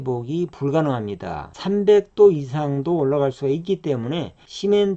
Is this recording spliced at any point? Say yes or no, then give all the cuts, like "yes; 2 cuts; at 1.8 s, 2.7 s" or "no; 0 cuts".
yes; 1 cut; at 1.5 s